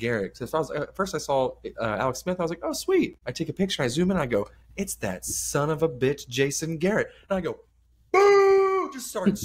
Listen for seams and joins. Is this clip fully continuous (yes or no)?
yes